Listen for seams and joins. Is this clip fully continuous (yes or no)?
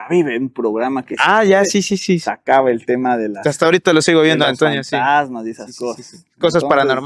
yes